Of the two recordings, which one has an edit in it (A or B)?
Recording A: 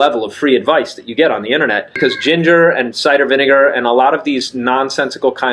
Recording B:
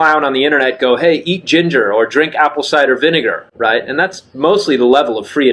A